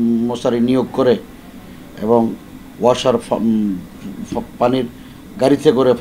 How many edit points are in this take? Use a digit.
0